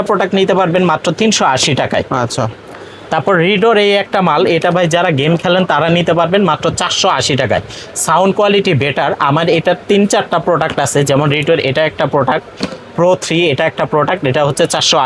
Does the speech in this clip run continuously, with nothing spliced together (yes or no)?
yes